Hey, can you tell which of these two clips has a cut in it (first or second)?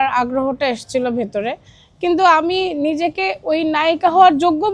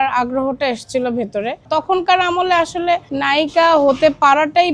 second